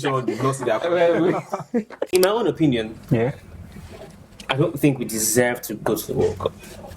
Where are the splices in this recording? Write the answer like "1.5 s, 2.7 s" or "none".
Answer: 2.1 s